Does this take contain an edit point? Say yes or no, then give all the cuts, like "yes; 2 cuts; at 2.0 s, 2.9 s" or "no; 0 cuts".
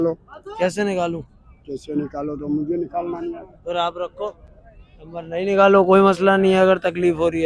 no; 0 cuts